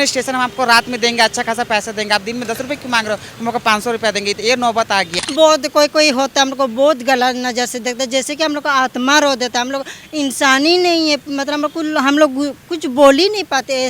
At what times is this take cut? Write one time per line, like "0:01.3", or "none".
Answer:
0:05.1